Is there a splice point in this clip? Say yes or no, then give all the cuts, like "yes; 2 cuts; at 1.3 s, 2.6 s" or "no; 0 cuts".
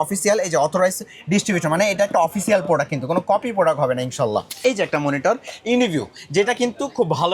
yes; 1 cut; at 4.5 s